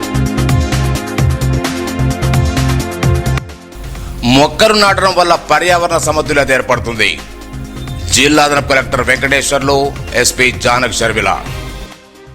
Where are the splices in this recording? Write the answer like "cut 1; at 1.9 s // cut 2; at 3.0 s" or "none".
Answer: cut 1; at 1.1 s